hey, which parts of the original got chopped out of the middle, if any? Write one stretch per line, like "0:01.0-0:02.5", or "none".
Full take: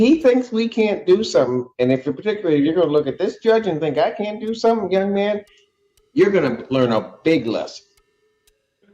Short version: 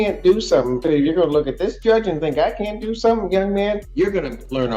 0:01.7-0:02.4
0:05.5-0:06.1